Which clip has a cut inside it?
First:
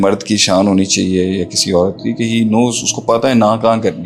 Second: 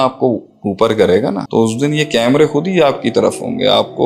second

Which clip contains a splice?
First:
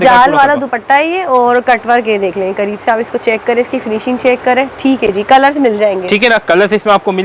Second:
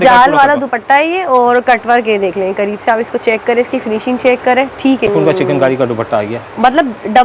second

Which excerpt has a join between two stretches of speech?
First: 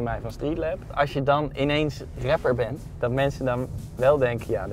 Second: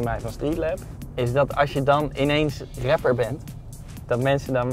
first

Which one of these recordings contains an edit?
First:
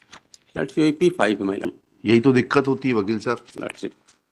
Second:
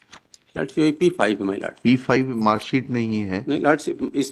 first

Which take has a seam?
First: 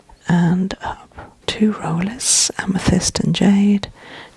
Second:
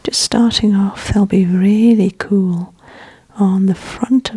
first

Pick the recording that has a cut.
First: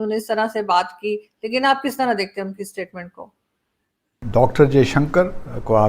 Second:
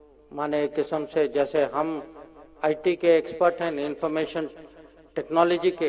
first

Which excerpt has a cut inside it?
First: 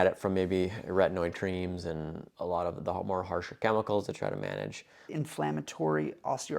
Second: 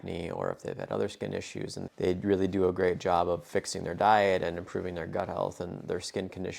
first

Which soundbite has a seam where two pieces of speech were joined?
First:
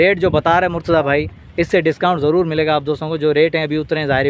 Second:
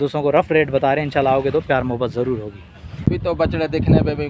second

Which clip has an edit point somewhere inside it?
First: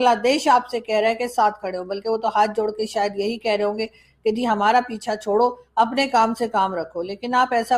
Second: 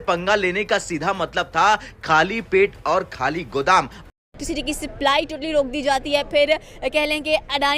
second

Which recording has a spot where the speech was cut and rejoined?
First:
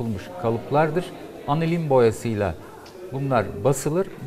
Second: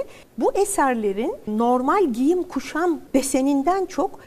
second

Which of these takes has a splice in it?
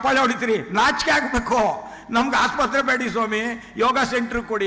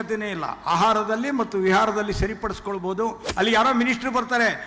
second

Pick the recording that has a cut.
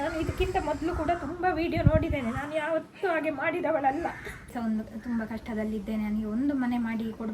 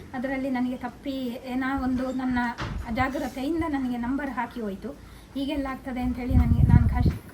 first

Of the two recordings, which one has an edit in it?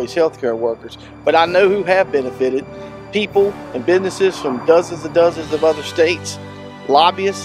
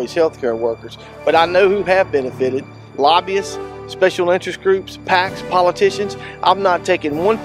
second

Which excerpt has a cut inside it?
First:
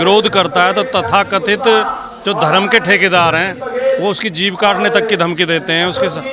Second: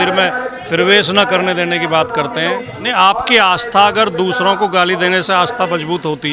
second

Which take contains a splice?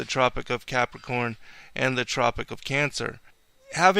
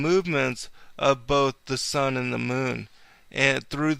first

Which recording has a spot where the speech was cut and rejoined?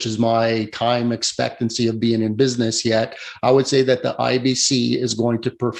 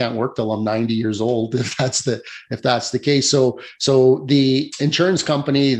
second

